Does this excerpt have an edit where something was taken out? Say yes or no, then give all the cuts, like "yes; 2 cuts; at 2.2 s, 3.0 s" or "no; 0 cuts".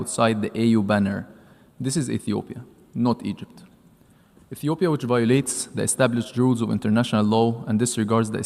no; 0 cuts